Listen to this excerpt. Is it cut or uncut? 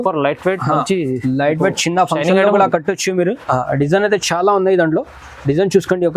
cut